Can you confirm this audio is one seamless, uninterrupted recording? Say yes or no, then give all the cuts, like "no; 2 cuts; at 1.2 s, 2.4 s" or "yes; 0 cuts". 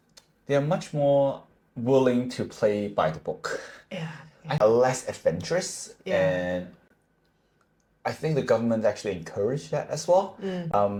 yes; 0 cuts